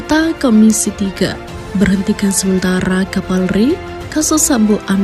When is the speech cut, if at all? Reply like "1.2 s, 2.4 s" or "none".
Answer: none